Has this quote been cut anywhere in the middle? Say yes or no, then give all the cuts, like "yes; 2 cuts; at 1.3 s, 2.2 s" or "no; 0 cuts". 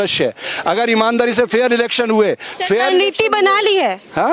no; 0 cuts